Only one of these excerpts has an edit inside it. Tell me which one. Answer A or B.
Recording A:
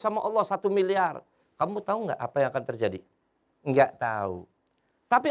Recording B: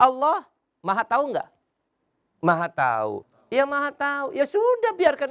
B